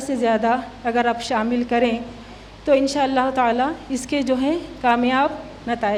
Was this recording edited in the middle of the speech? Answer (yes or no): no